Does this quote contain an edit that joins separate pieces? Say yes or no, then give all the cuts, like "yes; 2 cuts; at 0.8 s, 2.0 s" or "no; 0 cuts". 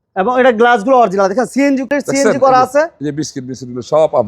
yes; 1 cut; at 1.8 s